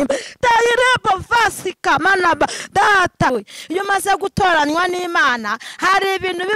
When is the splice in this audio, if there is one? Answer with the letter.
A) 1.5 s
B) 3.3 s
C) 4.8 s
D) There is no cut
B